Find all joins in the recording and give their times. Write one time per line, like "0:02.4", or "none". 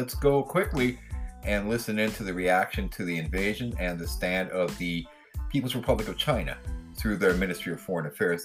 none